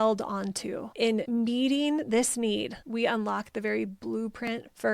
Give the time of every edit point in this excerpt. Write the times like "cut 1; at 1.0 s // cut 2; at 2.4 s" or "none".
cut 1; at 1.1 s